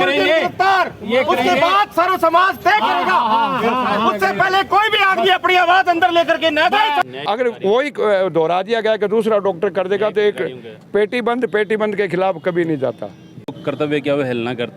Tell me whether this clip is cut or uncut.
cut